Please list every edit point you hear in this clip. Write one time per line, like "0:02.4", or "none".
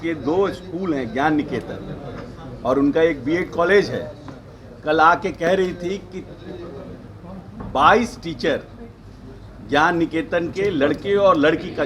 none